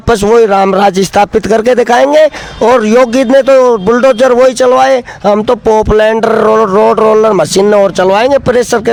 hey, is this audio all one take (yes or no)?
yes